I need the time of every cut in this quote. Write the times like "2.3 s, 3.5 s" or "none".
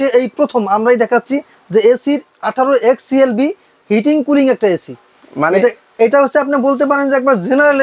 none